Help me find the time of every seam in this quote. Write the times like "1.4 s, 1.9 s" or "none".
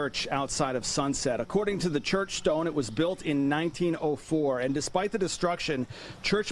none